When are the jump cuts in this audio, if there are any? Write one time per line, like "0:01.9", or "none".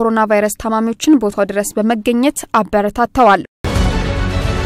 0:03.6